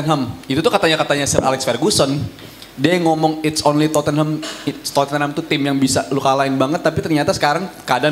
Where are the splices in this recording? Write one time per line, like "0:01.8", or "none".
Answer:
none